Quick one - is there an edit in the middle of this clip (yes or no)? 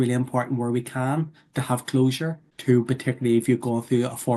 yes